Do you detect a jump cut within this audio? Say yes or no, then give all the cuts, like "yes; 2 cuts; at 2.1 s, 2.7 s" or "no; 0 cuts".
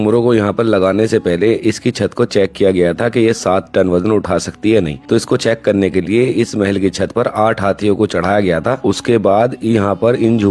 no; 0 cuts